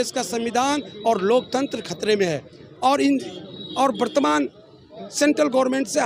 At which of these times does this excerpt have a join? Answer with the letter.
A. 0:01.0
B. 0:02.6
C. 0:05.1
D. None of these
D